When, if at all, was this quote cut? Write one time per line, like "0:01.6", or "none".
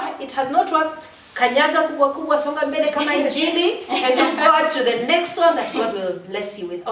none